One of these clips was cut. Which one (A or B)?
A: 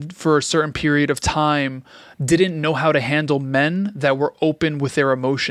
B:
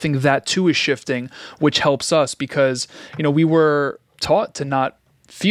B